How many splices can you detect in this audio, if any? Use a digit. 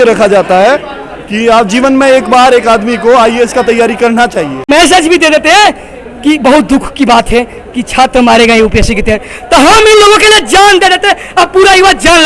1